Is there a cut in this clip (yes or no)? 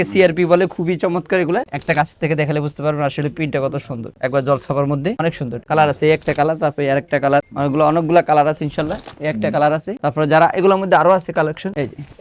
no